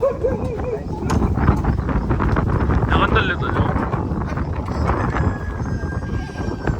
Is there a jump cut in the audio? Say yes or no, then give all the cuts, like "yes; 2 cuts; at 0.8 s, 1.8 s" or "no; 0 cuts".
no; 0 cuts